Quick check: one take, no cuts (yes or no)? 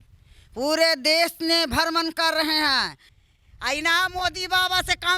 no